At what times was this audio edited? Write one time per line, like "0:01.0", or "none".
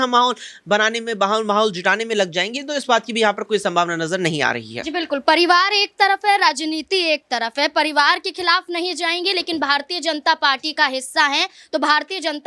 none